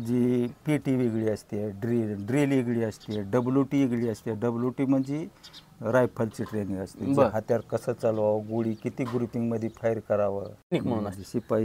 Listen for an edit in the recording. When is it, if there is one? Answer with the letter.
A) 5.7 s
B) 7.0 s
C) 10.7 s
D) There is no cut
C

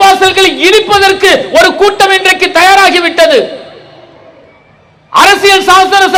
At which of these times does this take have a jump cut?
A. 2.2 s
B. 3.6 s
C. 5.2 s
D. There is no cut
D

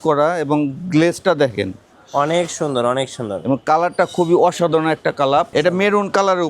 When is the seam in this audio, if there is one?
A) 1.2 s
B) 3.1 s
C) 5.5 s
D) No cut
C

